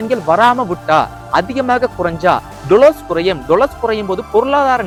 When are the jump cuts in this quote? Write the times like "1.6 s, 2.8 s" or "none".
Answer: none